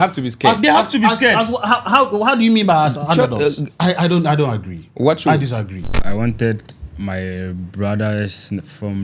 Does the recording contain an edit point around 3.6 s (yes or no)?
yes